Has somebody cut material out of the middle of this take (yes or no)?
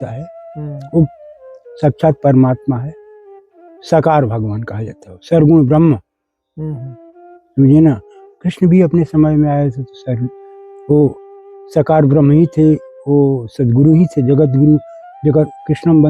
no